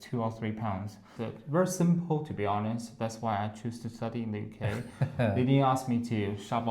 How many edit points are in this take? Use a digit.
1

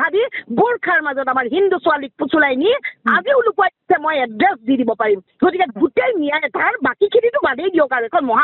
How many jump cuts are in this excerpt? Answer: 1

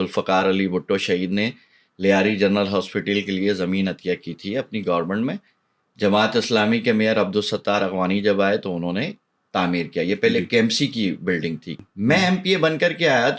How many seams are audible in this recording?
1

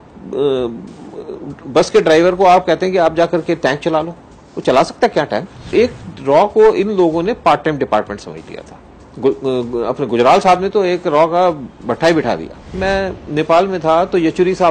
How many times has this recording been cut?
2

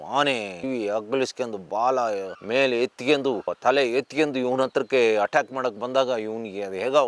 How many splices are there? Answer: 0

